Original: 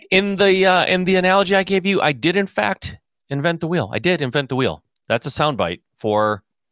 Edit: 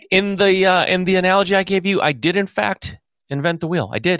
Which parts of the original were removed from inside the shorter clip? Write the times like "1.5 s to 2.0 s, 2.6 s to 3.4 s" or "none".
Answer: none